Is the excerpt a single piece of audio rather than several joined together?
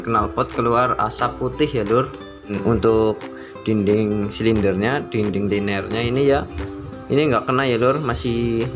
no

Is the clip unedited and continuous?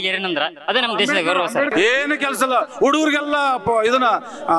no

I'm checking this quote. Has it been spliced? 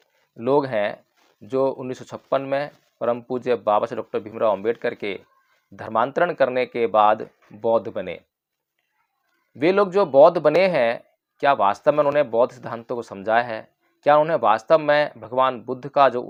no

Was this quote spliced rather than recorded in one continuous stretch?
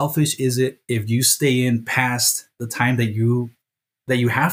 no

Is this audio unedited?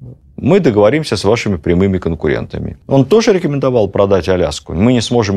no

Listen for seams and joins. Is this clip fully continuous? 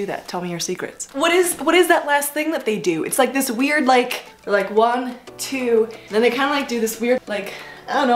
no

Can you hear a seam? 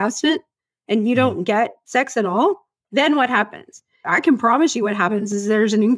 yes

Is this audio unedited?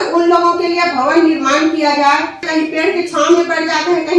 no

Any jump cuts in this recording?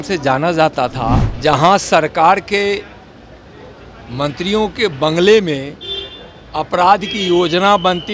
yes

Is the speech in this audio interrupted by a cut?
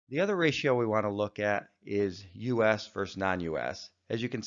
yes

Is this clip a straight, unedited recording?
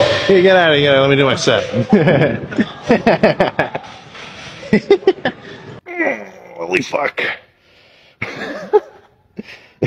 yes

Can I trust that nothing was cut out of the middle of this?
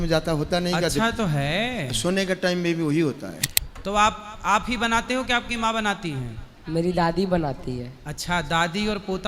no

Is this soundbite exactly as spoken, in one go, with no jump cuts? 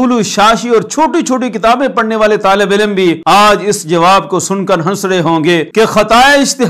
no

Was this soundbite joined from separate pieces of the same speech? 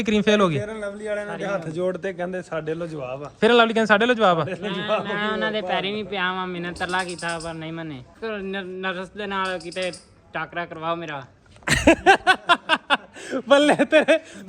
yes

